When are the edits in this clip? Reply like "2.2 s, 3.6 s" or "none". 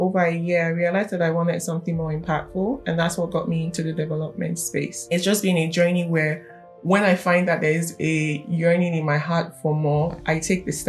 5.0 s